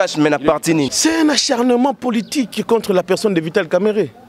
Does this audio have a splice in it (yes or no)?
yes